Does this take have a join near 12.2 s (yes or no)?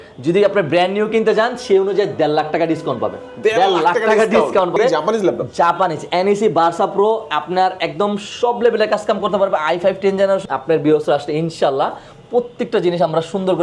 no